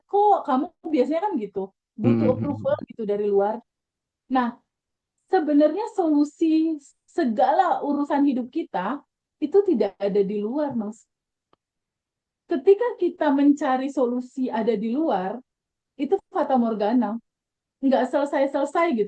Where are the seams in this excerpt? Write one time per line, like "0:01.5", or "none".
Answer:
none